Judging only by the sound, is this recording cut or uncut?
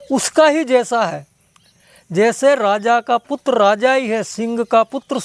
uncut